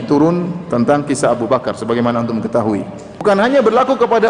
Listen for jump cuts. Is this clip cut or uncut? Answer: cut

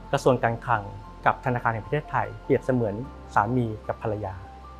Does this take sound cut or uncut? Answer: uncut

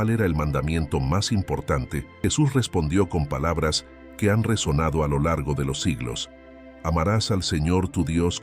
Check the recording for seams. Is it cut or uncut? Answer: cut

